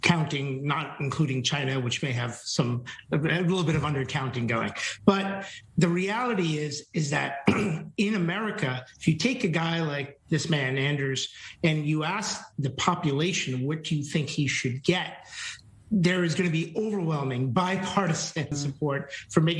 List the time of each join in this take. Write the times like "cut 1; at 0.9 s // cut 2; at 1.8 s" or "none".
cut 1; at 18.6 s